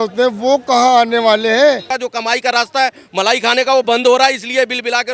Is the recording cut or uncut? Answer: cut